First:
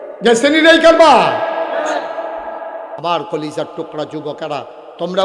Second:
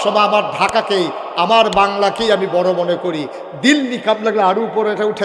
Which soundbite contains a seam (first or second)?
first